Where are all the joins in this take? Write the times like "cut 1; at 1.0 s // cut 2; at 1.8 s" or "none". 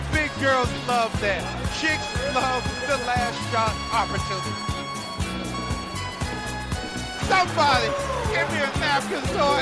none